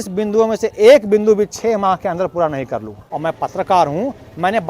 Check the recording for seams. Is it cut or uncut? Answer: cut